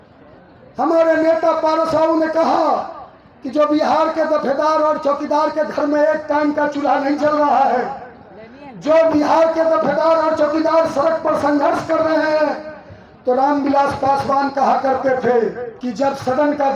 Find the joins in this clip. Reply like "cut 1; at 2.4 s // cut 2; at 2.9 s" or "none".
none